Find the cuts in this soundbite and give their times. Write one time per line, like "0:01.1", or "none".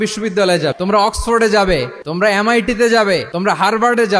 0:00.7
0:02.0
0:03.3